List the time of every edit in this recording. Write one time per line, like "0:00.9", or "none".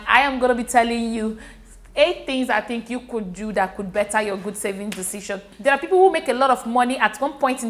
0:05.5